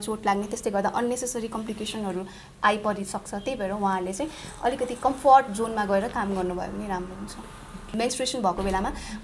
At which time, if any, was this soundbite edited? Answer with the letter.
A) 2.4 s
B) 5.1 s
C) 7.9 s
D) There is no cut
C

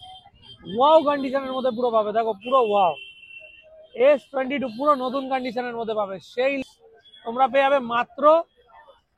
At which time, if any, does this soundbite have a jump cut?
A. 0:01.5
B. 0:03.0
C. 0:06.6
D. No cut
C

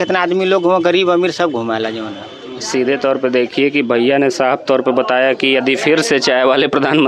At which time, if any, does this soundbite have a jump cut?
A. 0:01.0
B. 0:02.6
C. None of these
B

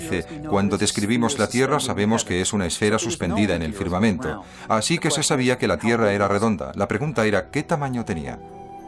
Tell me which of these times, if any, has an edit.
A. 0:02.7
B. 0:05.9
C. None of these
C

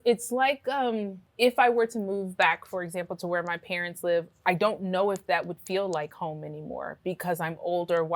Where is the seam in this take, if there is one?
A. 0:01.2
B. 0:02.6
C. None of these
A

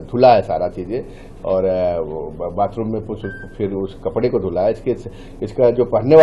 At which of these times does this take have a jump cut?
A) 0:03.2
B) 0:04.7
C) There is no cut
C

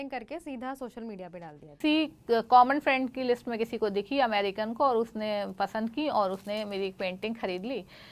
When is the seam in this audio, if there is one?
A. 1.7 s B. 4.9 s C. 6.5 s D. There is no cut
A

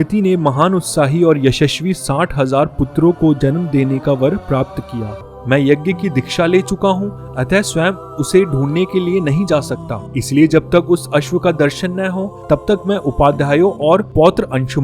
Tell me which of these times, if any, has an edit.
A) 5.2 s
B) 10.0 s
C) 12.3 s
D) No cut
A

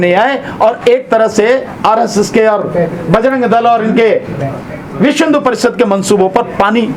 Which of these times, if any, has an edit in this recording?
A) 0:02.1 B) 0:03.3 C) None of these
C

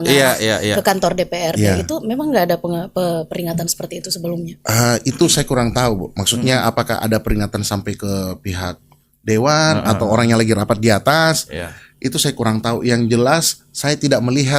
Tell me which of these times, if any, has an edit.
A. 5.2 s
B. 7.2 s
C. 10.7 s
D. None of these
D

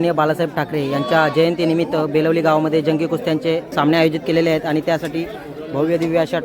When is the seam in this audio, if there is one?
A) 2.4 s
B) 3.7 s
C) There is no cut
B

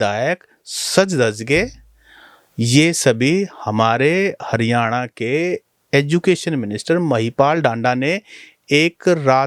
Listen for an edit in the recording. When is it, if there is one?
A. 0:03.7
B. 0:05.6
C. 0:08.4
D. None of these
D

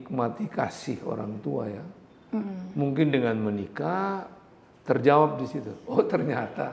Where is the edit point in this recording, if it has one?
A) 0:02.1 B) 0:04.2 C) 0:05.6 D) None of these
D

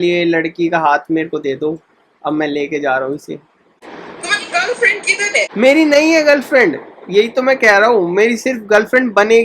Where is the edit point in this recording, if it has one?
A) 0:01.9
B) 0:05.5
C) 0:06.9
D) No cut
B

